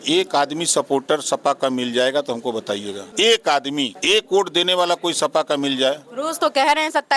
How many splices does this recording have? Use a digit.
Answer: 2